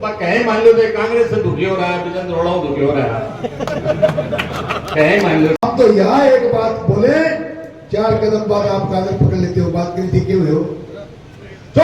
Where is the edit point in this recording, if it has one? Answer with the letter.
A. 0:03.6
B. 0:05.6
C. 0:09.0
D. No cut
B